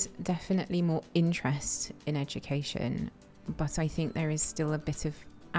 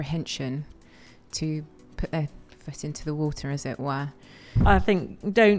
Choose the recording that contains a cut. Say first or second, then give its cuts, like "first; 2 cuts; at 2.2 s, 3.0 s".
second; 1 cut; at 4.6 s